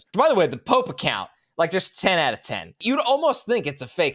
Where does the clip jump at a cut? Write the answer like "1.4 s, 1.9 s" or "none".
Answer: 2.8 s